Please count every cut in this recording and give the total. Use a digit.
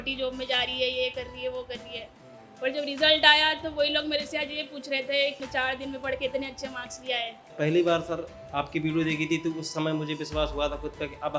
2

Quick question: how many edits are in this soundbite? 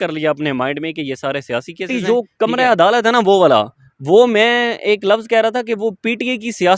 1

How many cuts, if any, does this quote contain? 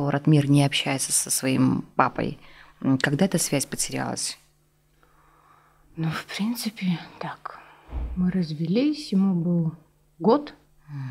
0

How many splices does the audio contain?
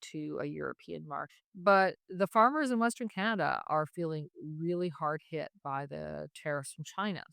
1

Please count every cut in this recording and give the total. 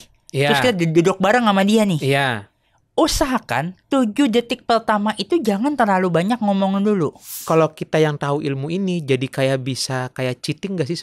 1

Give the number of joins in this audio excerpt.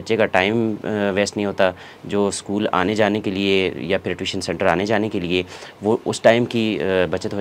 0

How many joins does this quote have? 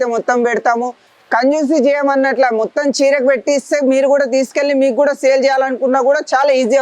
0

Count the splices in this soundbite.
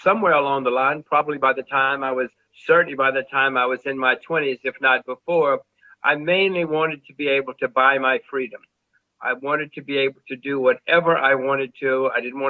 0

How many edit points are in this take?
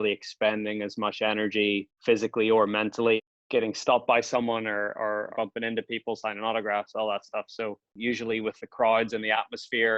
3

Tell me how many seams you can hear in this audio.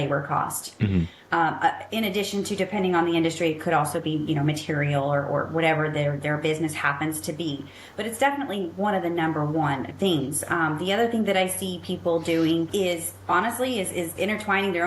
2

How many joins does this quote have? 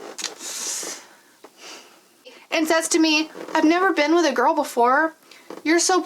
1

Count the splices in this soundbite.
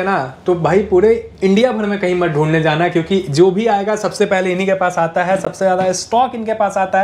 0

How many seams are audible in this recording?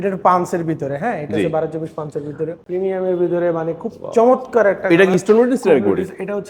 1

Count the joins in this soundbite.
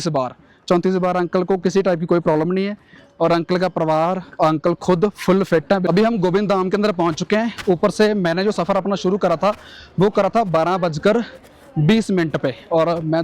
1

